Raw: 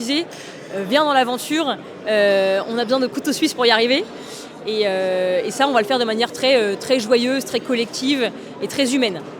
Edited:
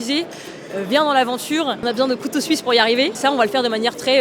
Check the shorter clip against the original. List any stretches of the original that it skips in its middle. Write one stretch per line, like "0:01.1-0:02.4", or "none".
0:01.8-0:02.7
0:04.1-0:05.5